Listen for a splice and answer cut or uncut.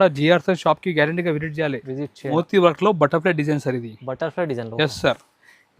cut